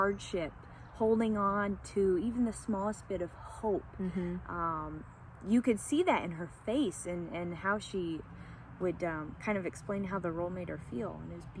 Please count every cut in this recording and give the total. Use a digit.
0